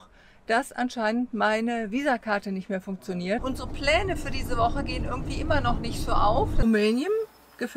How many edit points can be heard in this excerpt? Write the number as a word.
two